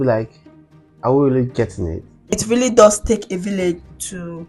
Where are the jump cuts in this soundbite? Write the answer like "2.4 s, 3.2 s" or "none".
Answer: 2.3 s